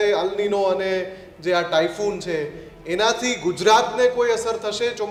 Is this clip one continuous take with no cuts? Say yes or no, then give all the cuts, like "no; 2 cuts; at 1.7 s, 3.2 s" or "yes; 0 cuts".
yes; 0 cuts